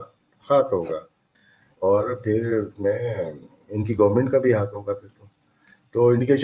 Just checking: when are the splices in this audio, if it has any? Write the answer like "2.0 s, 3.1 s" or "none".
none